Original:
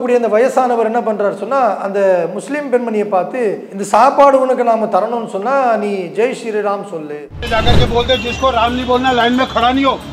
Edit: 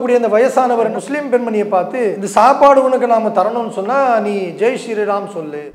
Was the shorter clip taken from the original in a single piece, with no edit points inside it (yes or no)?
no